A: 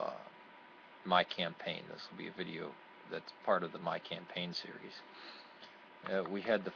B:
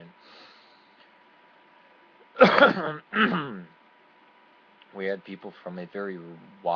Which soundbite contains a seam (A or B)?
B